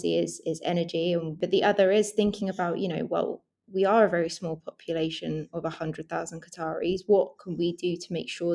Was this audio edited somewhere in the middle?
yes; 1 cut; at 1.4 s

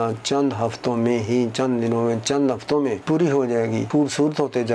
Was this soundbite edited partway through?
yes; 2 cuts; at 3.0 s, 3.9 s

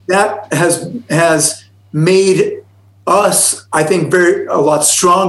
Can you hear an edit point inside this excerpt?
no; 0 cuts

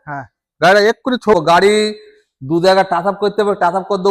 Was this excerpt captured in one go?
no; 1 cut; at 1.3 s

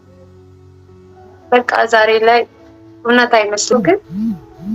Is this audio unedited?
no; 1 cut; at 3.6 s

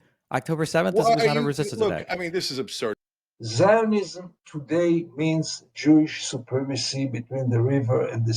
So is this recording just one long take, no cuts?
no; 1 cut; at 3.0 s

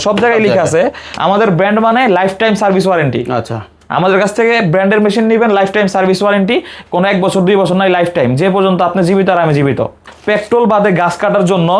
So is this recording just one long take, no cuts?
no; 2 cuts; at 1.1 s, 10.0 s

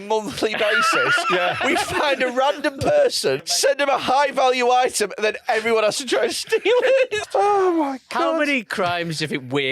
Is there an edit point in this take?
yes; 2 cuts; at 3.5 s, 7.2 s

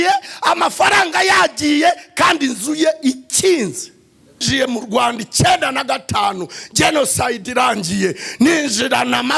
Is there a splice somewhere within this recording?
yes; 1 cut; at 4.5 s

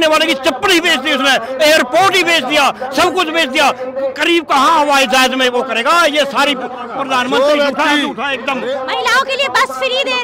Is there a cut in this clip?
no; 0 cuts

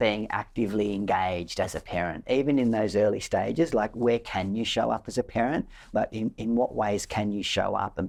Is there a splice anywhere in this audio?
no; 0 cuts

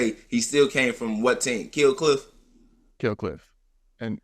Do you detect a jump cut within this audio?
no; 0 cuts

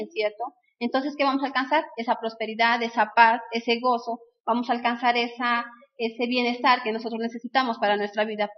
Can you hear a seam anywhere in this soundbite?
yes; 1 cut; at 2.6 s

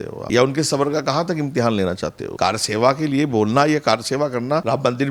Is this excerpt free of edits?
yes; 0 cuts

